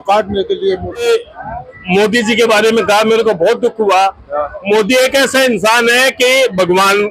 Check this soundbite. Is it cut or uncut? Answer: cut